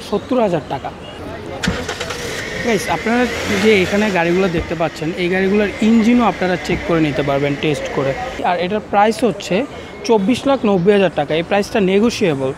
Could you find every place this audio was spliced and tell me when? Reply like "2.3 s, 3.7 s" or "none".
1.2 s, 8.4 s